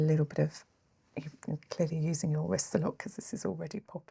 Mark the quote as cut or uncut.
uncut